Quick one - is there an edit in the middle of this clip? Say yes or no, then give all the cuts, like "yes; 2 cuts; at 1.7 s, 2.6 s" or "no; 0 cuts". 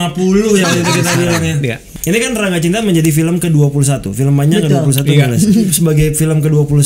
yes; 2 cuts; at 1.9 s, 5.7 s